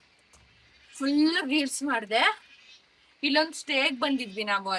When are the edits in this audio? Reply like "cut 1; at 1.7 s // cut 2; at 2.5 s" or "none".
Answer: none